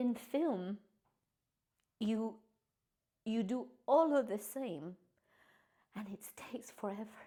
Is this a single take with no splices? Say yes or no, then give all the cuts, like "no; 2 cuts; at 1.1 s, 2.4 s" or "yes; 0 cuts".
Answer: yes; 0 cuts